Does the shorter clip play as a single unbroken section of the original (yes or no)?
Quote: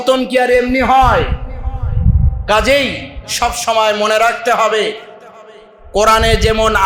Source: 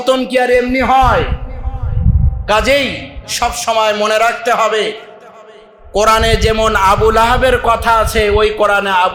yes